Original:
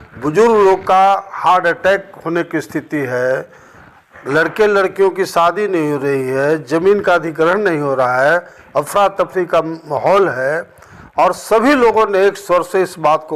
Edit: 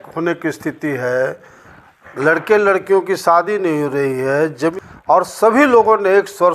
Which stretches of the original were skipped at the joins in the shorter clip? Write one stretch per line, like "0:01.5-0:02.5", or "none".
0:06.8-0:10.8